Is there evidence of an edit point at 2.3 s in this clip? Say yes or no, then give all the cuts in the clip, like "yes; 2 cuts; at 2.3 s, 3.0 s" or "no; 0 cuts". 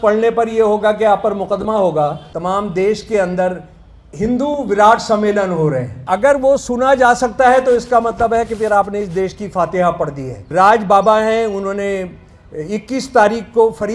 yes; 3 cuts; at 2.3 s, 5.9 s, 10.5 s